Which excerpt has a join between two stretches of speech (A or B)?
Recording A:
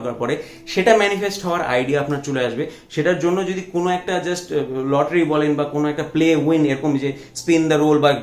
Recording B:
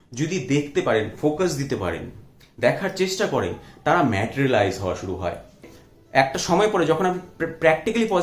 B